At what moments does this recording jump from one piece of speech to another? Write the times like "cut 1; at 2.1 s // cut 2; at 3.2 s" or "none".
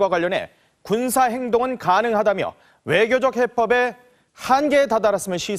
cut 1; at 0.9 s